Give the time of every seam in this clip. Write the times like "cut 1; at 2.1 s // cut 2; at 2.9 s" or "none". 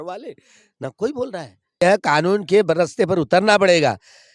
cut 1; at 1.8 s